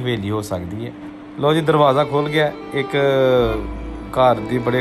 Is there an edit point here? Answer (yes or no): no